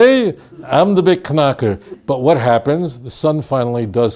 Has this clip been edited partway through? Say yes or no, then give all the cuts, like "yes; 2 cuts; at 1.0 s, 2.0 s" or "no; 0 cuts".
yes; 1 cut; at 1.9 s